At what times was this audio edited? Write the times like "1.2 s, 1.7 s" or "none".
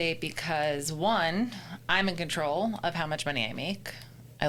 none